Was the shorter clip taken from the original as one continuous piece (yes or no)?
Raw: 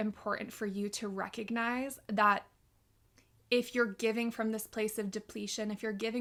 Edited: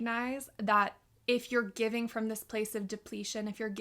no